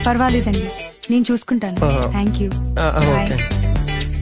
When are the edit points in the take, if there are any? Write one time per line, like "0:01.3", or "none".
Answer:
0:02.5